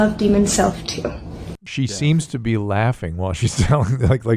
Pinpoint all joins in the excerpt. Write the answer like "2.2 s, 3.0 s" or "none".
1.6 s